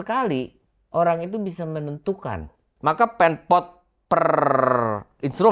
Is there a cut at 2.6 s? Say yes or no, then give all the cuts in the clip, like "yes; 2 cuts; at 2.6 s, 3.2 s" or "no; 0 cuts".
yes; 1 cut; at 2.6 s